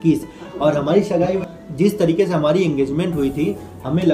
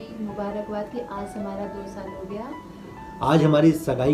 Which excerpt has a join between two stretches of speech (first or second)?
first